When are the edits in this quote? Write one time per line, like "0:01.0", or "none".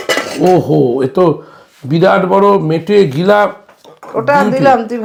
none